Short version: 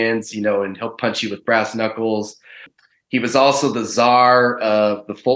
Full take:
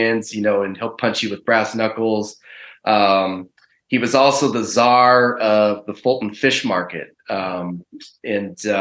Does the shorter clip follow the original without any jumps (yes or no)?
no